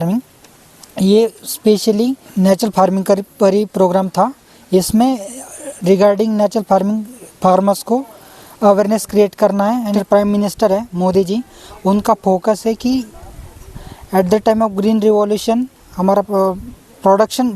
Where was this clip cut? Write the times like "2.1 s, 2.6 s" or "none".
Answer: 2.2 s, 9.9 s

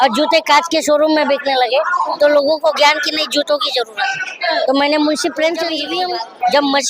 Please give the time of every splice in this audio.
5.8 s

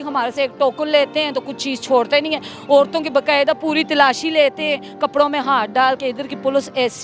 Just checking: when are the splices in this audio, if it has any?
none

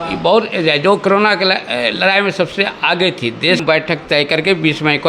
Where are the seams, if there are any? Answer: 3.6 s

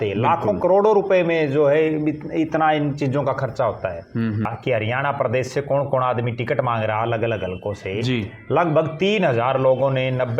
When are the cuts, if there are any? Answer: 4.5 s

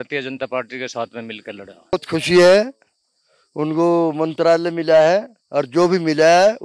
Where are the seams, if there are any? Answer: 1.9 s

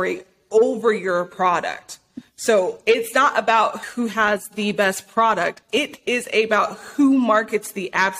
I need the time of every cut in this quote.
3.8 s, 5.8 s

